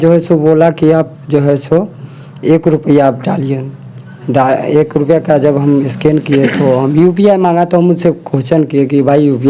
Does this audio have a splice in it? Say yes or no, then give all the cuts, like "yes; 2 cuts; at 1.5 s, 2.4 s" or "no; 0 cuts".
no; 0 cuts